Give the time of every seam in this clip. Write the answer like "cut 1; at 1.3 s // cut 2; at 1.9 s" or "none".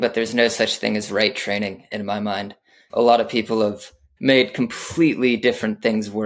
cut 1; at 2.8 s // cut 2; at 4.0 s